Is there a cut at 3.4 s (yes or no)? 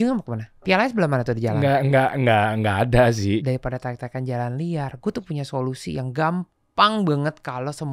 yes